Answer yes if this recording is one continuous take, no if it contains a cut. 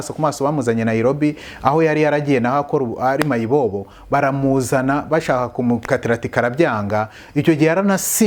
yes